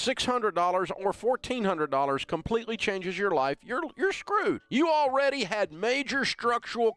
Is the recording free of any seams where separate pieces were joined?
yes; 0 cuts

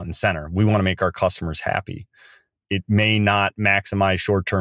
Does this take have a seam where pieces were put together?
yes; 1 cut; at 2.6 s

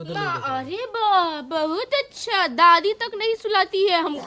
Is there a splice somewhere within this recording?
no; 0 cuts

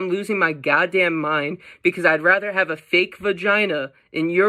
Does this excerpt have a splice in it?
no; 0 cuts

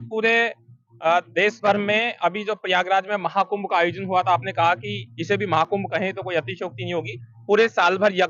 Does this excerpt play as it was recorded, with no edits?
yes; 0 cuts

